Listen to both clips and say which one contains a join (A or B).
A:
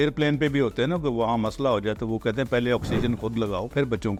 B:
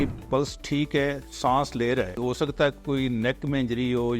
B